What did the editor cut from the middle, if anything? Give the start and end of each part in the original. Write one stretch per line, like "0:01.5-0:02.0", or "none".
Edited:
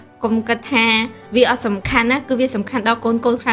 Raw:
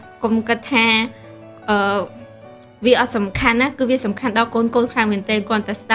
0:01.2-0:02.7